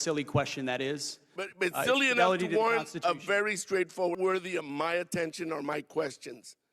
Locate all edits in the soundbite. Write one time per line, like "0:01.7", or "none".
0:04.2